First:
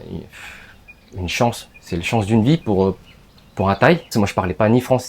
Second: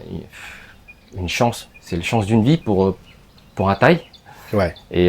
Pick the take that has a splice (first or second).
first